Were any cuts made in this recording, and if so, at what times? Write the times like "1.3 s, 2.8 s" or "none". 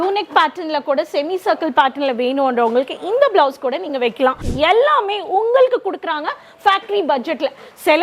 4.4 s